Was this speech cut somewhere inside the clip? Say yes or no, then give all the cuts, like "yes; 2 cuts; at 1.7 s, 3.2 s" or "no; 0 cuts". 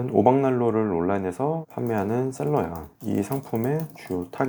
no; 0 cuts